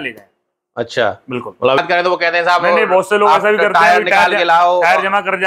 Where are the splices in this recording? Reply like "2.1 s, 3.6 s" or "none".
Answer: 1.8 s